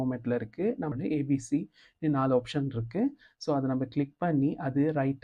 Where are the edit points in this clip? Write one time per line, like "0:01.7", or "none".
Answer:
0:00.9